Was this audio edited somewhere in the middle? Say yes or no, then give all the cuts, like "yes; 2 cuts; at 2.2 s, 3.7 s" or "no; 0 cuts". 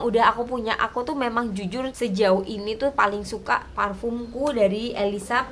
yes; 1 cut; at 1.9 s